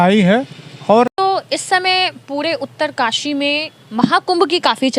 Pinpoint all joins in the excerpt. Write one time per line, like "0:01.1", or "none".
0:01.1